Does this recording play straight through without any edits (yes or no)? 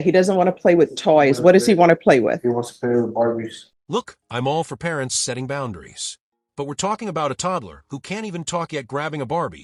yes